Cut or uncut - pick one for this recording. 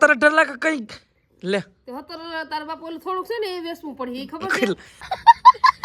cut